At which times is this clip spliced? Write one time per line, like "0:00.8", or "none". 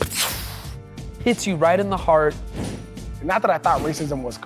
0:02.5

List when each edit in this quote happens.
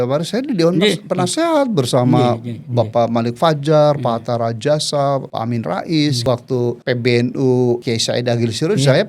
0:05.3
0:06.5
0:07.8

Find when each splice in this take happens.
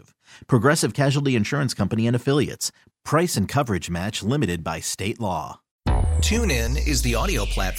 0:05.6

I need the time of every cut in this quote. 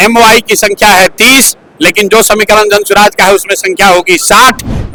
none

